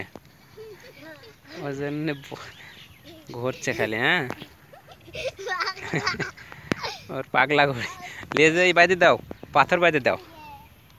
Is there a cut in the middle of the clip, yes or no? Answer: no